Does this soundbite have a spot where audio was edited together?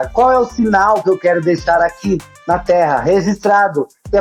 no; 0 cuts

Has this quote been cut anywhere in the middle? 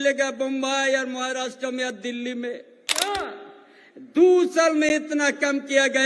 yes; 1 cut; at 3.1 s

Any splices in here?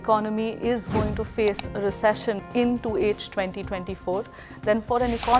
yes; 1 cut; at 2.4 s

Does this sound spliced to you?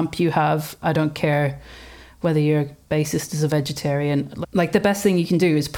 yes; 1 cut; at 4.3 s

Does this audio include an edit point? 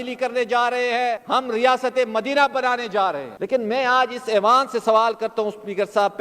yes; 2 cuts; at 1.2 s, 3.3 s

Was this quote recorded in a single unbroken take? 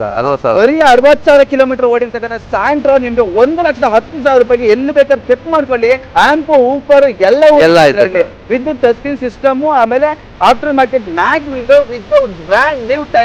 no; 1 cut; at 6.0 s

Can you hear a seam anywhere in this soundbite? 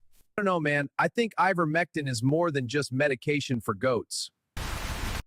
yes; 1 cut; at 4.3 s

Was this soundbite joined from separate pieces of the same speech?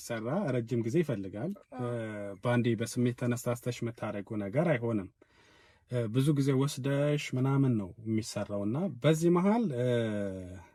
no; 0 cuts

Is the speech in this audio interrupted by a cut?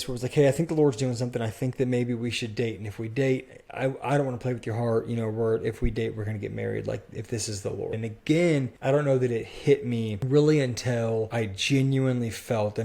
yes; 4 cuts; at 8.0 s, 8.7 s, 10.2 s, 11.3 s

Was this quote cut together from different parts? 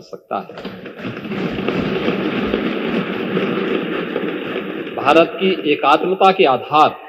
no; 0 cuts

